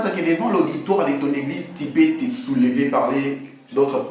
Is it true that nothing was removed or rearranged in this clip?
yes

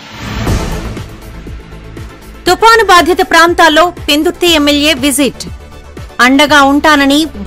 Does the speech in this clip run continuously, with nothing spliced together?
yes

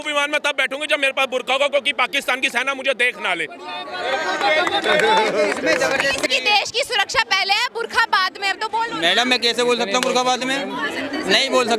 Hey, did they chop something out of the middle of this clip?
yes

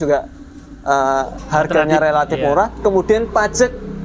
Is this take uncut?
yes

